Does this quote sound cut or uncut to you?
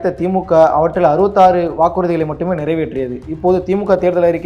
uncut